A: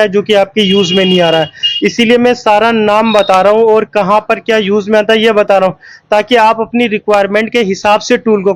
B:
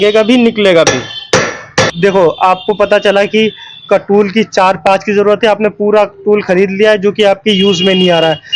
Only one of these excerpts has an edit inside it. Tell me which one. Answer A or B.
B